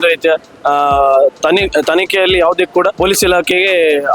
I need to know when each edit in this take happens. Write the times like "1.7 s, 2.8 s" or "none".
2.9 s